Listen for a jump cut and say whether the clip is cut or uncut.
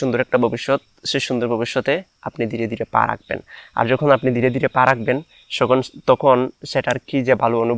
uncut